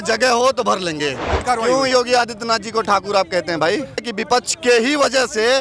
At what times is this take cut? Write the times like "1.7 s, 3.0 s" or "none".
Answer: 1.4 s, 4.0 s